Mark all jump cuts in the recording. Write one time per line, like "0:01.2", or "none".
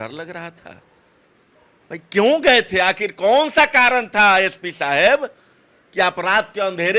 none